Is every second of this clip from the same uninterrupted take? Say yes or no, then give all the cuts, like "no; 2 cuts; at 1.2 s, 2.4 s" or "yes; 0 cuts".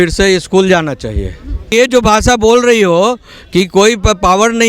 no; 1 cut; at 1.7 s